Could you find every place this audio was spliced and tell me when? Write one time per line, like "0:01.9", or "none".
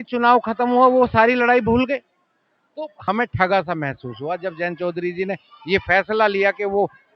0:02.9